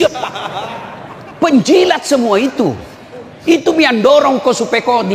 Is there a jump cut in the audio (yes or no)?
no